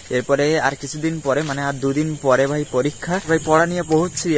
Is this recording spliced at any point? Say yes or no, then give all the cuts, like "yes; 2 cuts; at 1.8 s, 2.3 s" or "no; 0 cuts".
yes; 1 cut; at 3.2 s